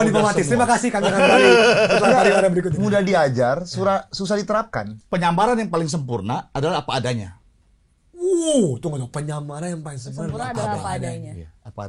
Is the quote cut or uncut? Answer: cut